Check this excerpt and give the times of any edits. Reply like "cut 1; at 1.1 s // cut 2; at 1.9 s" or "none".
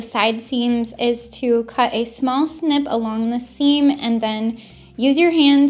cut 1; at 0.9 s